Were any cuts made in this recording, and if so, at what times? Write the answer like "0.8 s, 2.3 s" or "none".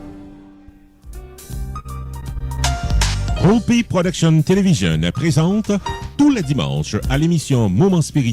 1.2 s